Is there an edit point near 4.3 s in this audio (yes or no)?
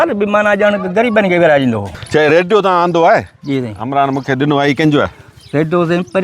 no